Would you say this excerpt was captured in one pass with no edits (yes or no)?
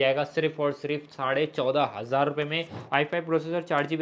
no